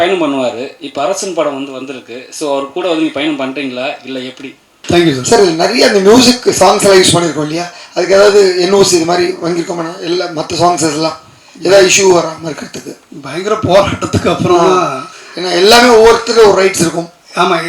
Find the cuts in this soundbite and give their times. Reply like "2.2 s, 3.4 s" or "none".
4.8 s

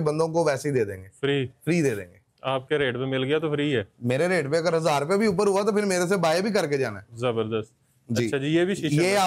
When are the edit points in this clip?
none

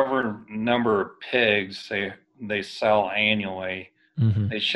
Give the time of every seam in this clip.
none

